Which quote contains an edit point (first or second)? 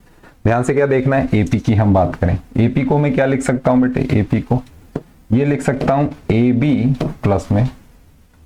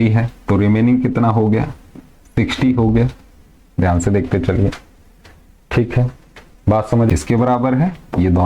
second